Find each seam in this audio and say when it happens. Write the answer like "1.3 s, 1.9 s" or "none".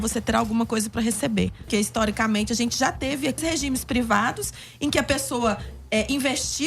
1.6 s, 3.4 s